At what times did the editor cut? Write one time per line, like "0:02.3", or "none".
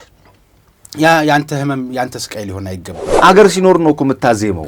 0:03.0